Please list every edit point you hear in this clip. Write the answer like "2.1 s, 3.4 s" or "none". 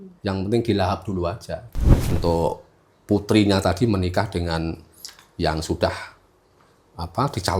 2.1 s